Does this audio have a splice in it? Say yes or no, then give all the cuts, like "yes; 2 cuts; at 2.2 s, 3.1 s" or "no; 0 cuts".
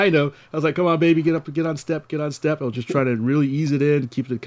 no; 0 cuts